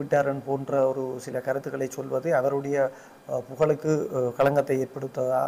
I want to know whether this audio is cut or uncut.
uncut